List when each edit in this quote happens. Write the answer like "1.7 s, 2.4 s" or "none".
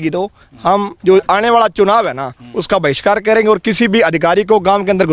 none